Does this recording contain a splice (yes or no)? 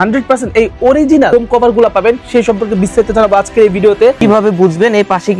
yes